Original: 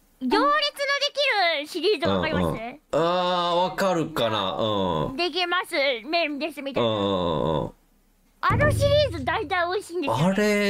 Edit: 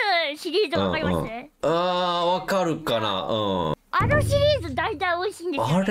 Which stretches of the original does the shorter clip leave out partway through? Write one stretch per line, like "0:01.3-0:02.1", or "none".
0:05.1-0:08.3